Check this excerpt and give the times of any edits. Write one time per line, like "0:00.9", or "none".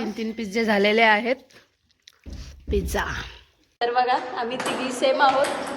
0:03.6